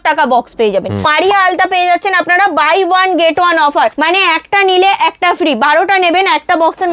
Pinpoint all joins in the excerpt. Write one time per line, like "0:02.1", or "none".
0:01.1
0:04.0